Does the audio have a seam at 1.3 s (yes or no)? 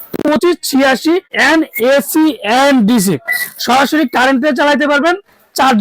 yes